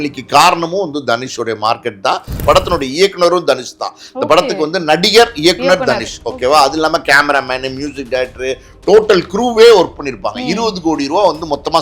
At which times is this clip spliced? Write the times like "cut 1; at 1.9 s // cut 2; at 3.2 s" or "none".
cut 1; at 2.4 s